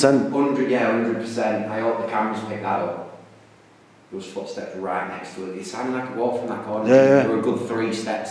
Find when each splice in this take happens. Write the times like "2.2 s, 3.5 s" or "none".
none